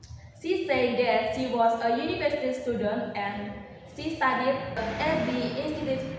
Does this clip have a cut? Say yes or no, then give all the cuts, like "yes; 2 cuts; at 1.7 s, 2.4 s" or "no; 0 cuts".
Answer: yes; 1 cut; at 5.0 s